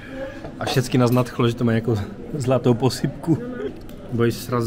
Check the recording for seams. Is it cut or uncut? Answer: cut